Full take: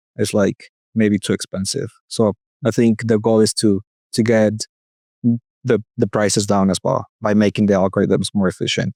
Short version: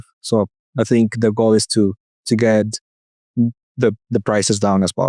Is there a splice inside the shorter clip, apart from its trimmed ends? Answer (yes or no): no